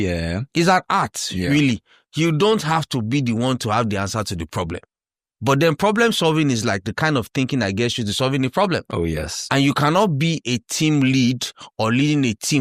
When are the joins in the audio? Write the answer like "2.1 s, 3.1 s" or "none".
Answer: none